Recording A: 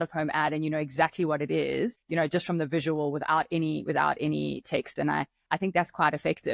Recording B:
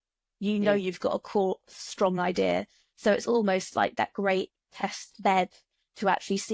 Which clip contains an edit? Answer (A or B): A